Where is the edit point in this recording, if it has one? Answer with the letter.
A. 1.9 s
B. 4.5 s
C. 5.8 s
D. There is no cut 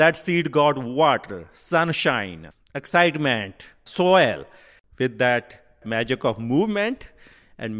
C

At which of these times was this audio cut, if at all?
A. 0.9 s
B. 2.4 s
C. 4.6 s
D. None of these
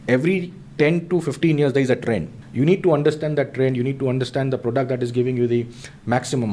B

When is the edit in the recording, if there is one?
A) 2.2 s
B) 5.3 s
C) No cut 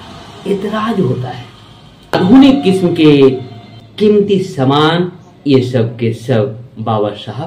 A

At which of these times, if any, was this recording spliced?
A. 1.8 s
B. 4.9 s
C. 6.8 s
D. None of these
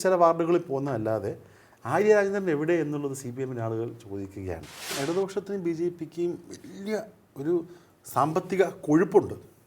B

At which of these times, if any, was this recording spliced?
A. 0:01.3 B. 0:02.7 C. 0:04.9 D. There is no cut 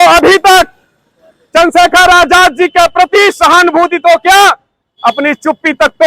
D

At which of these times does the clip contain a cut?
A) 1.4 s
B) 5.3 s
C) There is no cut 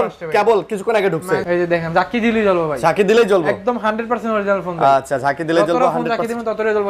A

